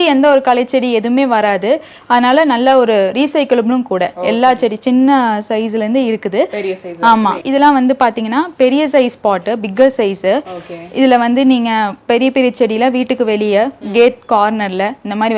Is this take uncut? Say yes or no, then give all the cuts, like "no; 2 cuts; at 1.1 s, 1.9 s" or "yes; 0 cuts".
yes; 0 cuts